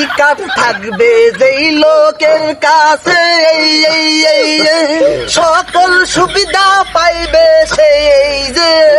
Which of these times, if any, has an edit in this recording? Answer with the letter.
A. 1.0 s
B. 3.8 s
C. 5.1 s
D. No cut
C